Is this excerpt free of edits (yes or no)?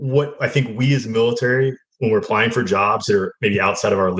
yes